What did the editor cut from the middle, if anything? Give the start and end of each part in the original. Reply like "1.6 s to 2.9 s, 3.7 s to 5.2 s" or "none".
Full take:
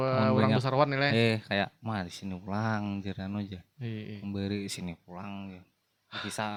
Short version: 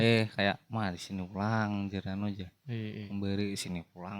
none